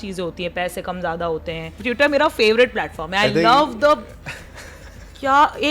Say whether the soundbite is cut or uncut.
cut